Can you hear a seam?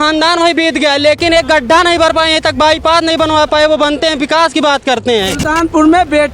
yes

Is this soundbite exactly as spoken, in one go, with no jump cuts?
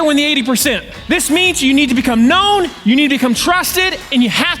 no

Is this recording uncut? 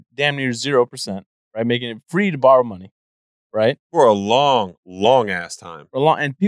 yes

